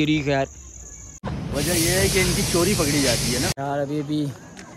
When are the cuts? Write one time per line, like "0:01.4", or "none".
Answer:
0:01.4
0:03.6